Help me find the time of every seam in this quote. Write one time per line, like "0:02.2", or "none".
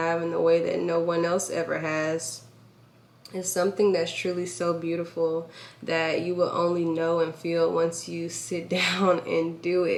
none